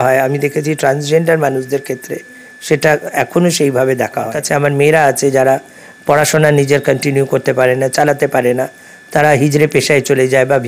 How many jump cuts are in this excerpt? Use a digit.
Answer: 1